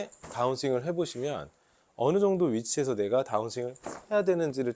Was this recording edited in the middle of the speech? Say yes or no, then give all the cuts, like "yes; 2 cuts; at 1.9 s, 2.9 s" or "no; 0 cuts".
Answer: no; 0 cuts